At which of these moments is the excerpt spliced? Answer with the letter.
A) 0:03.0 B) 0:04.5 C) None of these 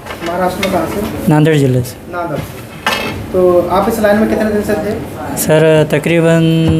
C